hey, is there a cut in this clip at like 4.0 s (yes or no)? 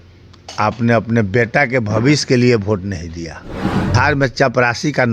yes